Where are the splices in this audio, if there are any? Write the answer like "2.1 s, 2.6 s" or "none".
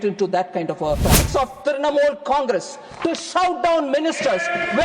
1.2 s